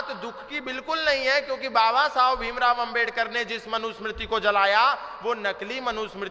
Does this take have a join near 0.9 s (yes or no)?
no